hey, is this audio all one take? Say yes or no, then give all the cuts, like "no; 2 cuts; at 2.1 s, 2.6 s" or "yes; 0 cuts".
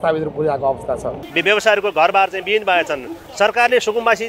no; 1 cut; at 1.2 s